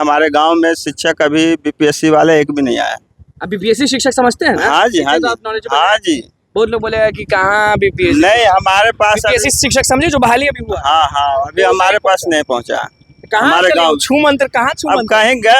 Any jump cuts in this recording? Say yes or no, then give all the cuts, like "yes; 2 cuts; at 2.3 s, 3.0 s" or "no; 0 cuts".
no; 0 cuts